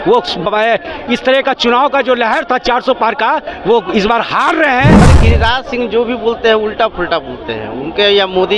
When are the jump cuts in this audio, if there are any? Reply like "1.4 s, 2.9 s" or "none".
5.0 s